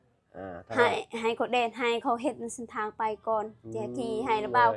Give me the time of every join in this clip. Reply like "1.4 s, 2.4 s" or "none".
none